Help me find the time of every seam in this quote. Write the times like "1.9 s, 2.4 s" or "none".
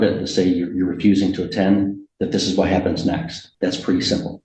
3.4 s